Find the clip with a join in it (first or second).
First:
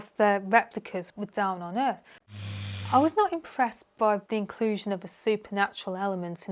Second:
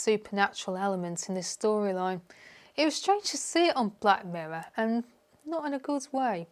first